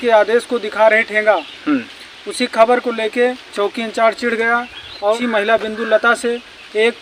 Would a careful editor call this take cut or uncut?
uncut